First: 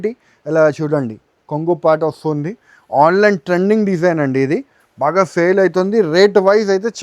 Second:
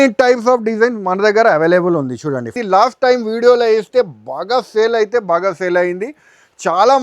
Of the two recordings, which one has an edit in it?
second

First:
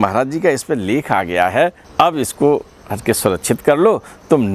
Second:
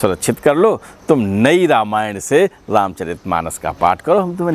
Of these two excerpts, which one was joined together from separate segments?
first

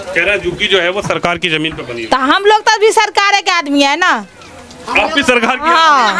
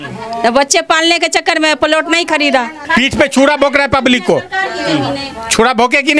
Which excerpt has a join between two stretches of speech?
second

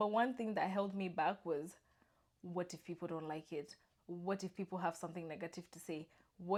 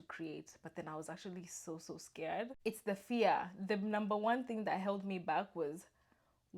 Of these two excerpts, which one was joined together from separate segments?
second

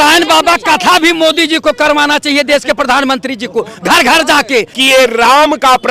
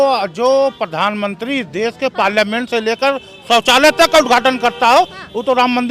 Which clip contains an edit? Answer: first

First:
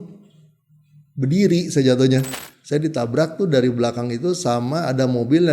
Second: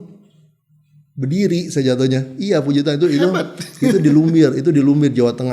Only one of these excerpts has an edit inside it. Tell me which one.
first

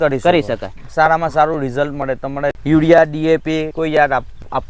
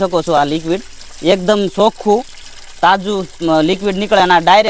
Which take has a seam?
first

